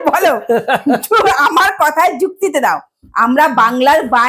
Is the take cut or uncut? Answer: uncut